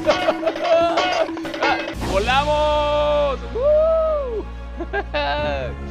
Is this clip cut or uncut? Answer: cut